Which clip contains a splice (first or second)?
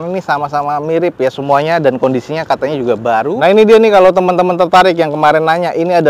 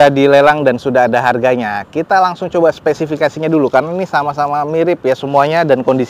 first